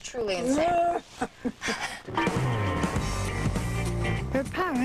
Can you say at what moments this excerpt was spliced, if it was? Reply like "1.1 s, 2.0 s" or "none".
3.0 s